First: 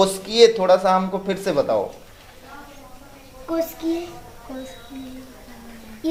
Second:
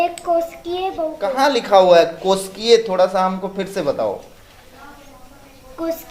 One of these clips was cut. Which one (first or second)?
second